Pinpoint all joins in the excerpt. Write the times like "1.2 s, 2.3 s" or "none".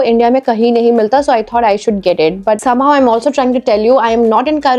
none